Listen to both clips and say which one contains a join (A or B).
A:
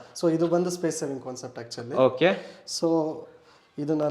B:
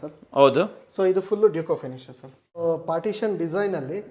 B